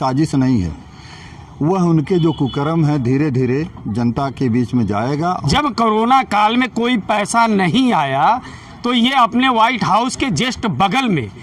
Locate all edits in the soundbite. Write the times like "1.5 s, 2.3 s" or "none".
5.3 s